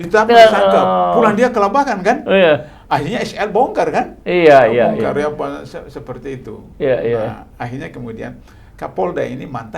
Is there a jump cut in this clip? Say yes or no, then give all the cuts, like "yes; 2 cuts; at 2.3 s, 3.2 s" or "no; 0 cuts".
no; 0 cuts